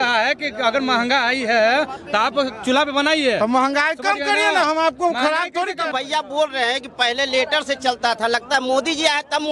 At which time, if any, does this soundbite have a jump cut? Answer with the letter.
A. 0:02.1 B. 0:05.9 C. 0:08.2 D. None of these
B